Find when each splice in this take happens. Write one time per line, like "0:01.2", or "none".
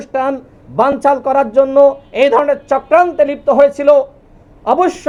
none